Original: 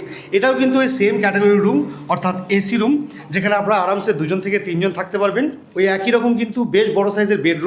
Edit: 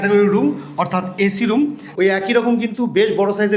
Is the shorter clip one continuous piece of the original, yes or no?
no